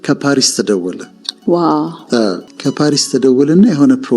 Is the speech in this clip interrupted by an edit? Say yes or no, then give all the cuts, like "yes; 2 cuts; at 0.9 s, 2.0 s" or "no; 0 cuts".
yes; 1 cut; at 2.5 s